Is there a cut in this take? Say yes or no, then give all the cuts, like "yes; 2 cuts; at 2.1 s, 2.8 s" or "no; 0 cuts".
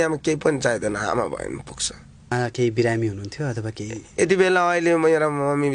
yes; 1 cut; at 2.3 s